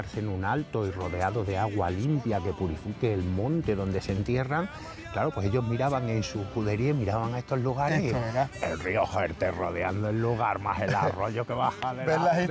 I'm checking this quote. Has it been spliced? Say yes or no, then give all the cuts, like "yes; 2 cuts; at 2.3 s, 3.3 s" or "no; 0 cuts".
no; 0 cuts